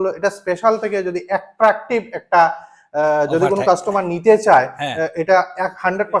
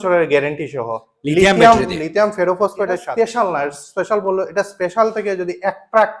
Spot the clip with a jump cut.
second; 1 cut; at 3.0 s

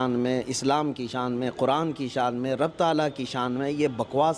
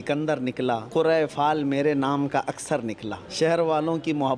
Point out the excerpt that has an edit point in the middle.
second; 2 cuts; at 0.9 s, 3.2 s

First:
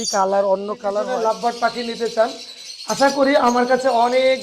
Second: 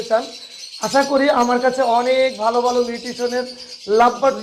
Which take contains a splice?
first; 1 cut; at 1.0 s

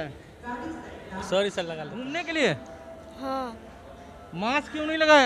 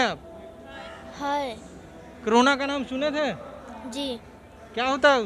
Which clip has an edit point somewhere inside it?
first; 1 cut; at 1.9 s

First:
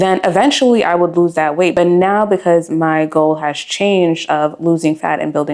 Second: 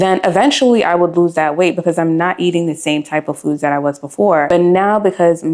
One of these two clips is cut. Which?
first; 1 cut; at 1.7 s

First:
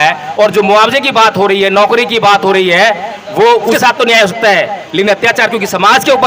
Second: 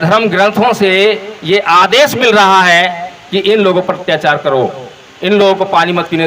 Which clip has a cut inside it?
first; 1 cut; at 3.8 s

